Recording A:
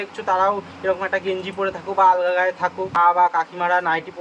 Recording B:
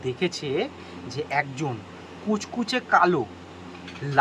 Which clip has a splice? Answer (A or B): A